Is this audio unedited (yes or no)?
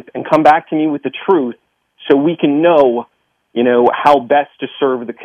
yes